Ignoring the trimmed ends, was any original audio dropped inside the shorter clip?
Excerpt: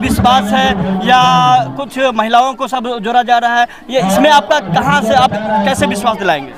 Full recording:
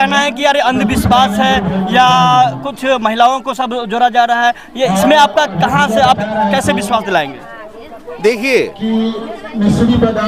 no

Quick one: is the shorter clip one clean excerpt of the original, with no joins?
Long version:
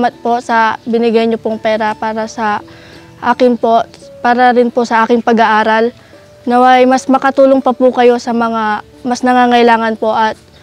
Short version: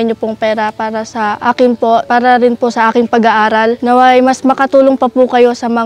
no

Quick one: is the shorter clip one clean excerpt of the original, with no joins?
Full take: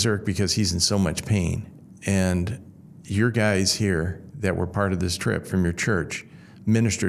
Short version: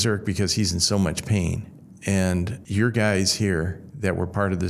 no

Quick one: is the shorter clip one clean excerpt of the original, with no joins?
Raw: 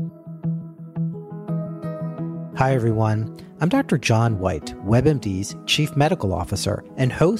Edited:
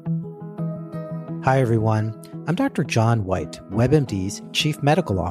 no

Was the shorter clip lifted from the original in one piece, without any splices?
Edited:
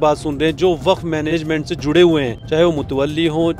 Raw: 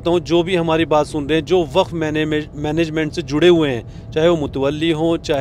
no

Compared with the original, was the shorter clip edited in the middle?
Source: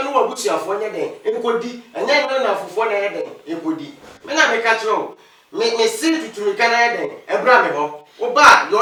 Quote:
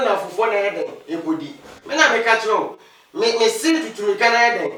no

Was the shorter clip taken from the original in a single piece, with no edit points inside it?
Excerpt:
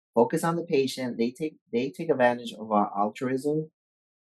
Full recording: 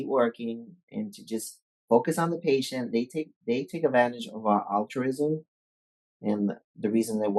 yes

